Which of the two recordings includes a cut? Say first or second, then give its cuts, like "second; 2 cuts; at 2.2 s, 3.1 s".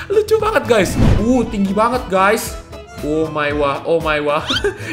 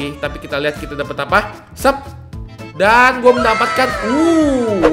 first; 1 cut; at 1.1 s